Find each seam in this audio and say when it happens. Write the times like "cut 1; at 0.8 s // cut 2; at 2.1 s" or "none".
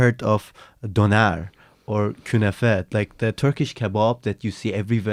none